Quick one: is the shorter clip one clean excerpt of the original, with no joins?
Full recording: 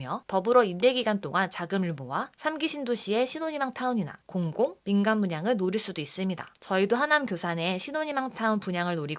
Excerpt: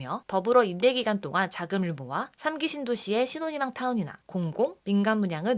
yes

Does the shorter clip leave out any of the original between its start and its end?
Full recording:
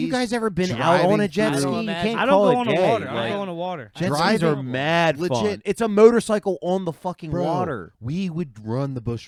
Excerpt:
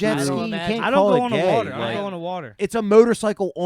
yes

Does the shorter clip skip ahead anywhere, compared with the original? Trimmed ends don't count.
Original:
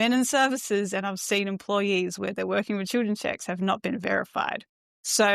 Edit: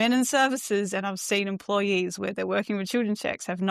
no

